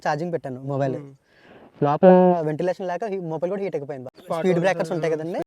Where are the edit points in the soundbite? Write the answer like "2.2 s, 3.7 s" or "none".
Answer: 4.1 s